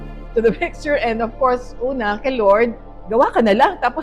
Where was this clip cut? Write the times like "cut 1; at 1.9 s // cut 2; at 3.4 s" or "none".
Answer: cut 1; at 2.9 s